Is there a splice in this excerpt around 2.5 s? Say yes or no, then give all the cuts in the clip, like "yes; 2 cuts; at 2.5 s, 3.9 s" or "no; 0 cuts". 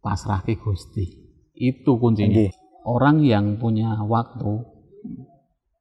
yes; 1 cut; at 2.5 s